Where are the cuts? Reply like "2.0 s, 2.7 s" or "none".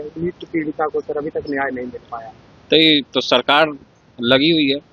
none